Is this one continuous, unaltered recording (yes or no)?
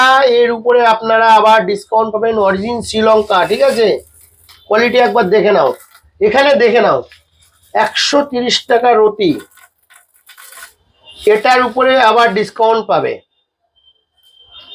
yes